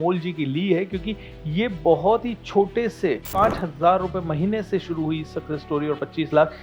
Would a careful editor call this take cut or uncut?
cut